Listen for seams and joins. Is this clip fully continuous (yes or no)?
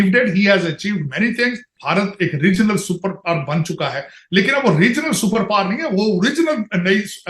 no